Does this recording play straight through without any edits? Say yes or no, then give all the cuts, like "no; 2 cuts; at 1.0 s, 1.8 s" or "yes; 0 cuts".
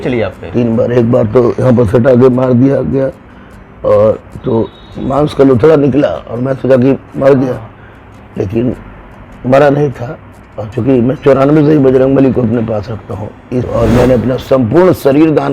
no; 1 cut; at 13.7 s